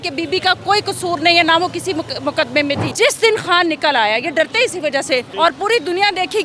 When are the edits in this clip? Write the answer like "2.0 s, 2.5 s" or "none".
2.8 s, 5.3 s